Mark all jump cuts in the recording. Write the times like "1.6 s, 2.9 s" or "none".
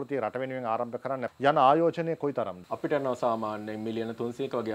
1.3 s, 2.6 s